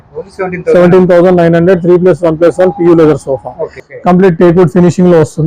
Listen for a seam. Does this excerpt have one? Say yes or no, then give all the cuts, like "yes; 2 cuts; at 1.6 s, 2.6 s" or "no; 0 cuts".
yes; 1 cut; at 3.8 s